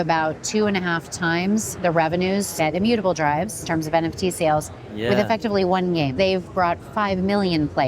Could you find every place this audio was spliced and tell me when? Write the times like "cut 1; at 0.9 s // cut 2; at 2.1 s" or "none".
cut 1; at 2.5 s // cut 2; at 3.6 s // cut 3; at 6.1 s